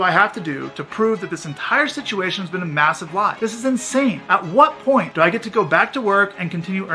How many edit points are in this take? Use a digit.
3